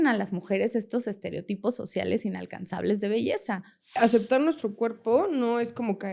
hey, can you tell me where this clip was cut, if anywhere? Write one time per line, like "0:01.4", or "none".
0:03.9